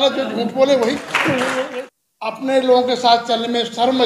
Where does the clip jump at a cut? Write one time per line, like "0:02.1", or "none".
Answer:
0:01.6